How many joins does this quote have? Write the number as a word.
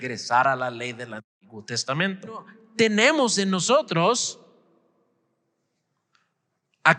one